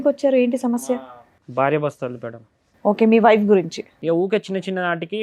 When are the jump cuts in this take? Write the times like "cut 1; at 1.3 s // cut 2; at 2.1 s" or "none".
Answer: cut 1; at 3.8 s